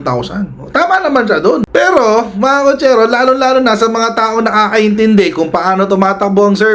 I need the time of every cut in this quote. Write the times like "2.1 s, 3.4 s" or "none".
1.7 s